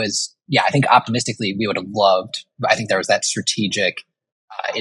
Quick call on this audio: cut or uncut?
uncut